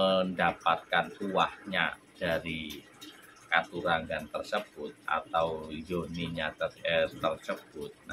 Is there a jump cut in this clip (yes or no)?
no